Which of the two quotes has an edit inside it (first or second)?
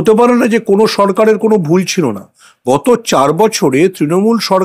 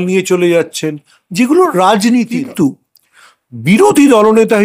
second